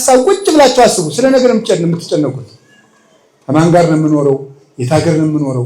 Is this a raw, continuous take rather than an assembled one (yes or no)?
yes